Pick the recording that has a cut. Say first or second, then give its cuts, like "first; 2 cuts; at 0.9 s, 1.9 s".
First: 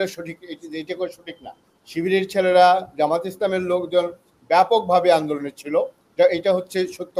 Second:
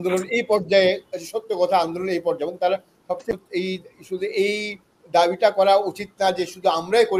second; 1 cut; at 3.3 s